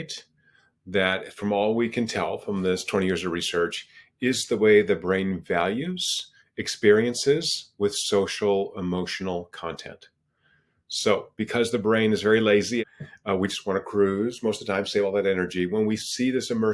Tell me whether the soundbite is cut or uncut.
cut